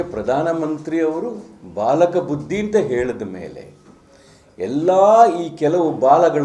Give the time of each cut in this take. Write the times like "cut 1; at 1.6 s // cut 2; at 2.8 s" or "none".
none